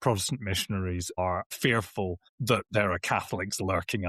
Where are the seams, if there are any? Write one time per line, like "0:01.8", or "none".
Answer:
0:01.2
0:02.3